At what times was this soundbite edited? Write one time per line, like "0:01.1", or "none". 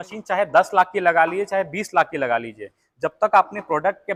none